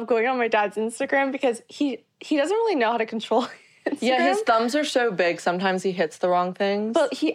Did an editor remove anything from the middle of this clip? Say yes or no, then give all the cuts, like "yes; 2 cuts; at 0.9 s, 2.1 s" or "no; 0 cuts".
no; 0 cuts